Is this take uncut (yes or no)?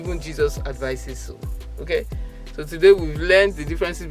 yes